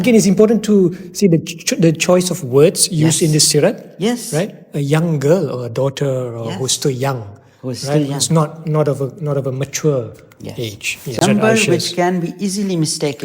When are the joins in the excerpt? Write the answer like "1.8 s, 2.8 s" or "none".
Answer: 11.1 s